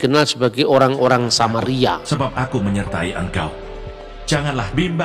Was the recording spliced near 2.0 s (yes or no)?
yes